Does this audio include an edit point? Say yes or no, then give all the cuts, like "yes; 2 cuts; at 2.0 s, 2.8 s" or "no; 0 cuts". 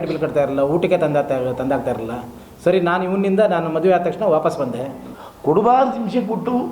yes; 1 cut; at 5.0 s